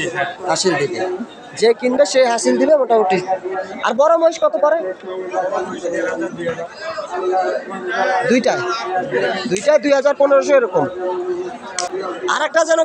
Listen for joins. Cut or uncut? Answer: cut